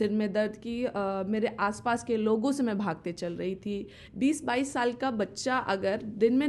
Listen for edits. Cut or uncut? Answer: cut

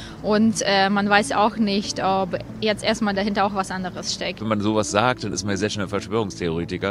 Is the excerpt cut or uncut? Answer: cut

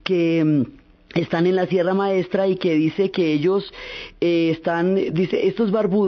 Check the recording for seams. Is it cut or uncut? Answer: uncut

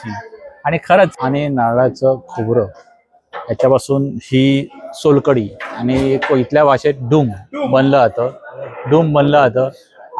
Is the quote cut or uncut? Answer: cut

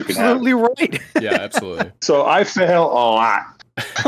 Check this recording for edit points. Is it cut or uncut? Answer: uncut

